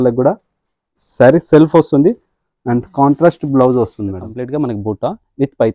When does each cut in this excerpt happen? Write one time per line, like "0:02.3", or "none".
0:04.3